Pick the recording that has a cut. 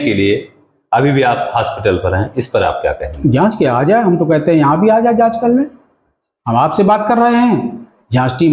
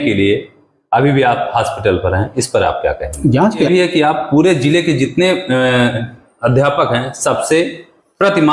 second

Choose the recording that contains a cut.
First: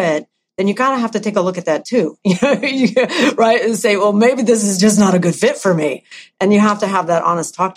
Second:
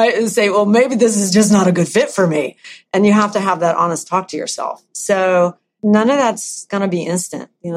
second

